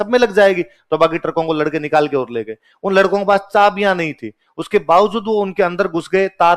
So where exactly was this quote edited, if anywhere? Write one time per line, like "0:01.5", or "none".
none